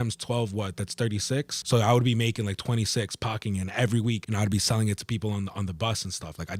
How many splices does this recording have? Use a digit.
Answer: 2